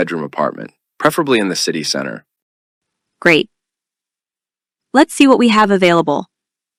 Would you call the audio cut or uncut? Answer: uncut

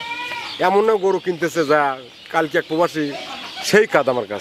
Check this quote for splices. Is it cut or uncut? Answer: uncut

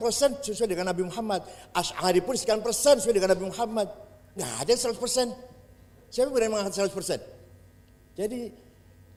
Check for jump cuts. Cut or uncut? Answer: uncut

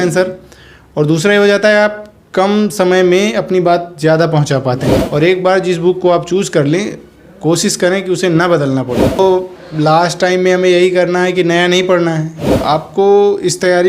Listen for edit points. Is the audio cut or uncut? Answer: cut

